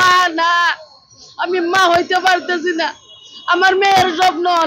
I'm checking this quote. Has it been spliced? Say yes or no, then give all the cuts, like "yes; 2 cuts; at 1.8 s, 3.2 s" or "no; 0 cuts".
no; 0 cuts